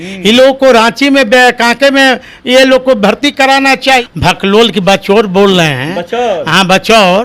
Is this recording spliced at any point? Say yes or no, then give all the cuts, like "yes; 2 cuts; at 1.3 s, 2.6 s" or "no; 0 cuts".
yes; 1 cut; at 4.0 s